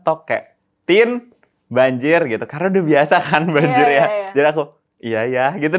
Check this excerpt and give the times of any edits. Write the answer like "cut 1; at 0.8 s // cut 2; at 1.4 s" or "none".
none

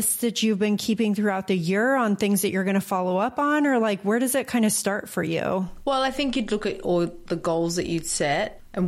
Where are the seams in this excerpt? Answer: cut 1; at 5.7 s

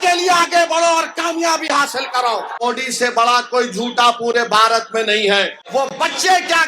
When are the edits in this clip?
cut 1; at 2.6 s // cut 2; at 5.6 s

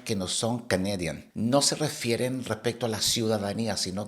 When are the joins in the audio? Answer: cut 1; at 1.2 s

